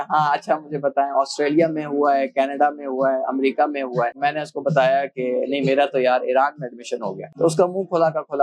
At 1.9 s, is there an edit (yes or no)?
no